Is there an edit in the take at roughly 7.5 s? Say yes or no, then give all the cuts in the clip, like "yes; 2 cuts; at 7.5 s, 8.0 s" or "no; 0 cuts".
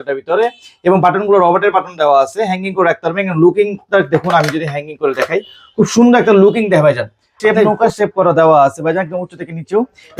yes; 1 cut; at 7.5 s